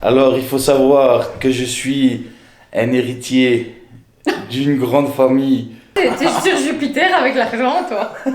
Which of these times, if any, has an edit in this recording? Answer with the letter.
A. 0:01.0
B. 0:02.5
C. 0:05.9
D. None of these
C